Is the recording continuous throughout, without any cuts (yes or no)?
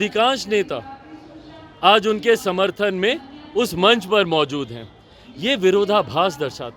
yes